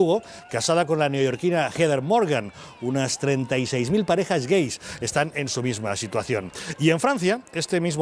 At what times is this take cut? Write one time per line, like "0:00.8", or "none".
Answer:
0:06.6